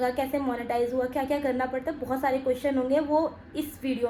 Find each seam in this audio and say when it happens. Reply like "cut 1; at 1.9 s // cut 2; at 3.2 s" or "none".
none